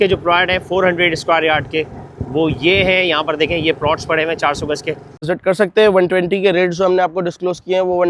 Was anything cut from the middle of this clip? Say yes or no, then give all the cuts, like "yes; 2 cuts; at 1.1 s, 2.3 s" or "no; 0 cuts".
yes; 1 cut; at 5.3 s